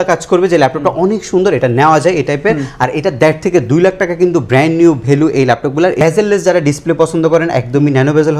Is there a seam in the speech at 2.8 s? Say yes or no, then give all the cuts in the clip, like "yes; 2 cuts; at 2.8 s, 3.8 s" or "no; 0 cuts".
no; 1 cut; at 6.0 s